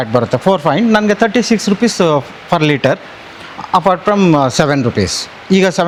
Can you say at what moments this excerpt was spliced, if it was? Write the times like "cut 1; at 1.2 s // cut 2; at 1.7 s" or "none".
none